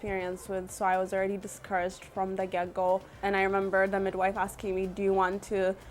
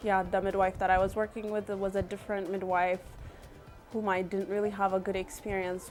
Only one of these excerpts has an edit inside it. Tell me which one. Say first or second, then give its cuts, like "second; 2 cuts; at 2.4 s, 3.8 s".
first; 1 cut; at 3.2 s